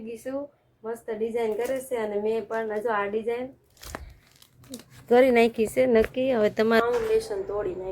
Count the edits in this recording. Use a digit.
1